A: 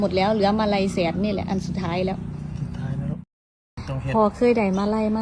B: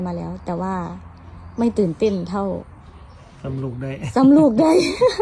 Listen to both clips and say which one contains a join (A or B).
A